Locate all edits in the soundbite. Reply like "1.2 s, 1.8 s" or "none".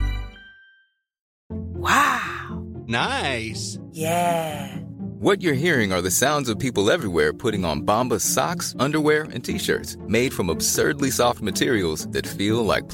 1.3 s